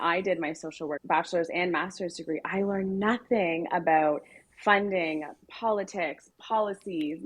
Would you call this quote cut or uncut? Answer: cut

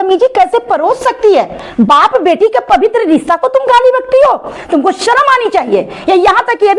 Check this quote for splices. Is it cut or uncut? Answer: cut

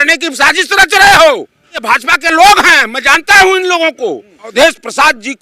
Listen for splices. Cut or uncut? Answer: cut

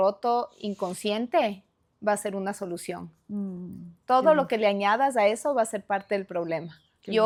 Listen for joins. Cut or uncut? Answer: uncut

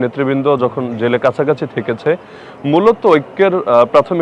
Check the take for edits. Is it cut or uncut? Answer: uncut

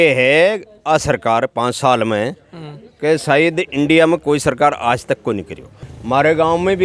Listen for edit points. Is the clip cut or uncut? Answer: uncut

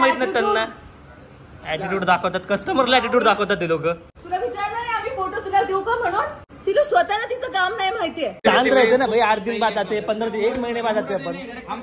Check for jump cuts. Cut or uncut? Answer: cut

